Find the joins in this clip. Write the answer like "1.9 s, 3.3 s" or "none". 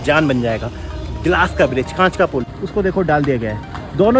2.5 s